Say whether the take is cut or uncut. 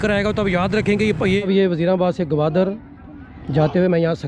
cut